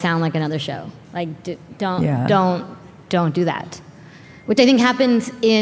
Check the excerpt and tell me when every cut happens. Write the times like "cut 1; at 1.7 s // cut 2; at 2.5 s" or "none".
none